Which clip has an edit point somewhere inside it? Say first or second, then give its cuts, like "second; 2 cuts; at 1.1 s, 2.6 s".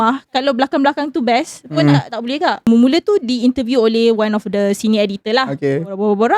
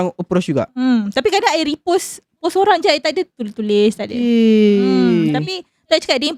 first; 1 cut; at 2.7 s